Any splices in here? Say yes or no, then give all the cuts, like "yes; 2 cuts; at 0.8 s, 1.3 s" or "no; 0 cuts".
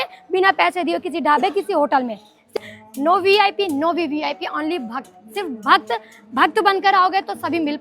yes; 1 cut; at 2.6 s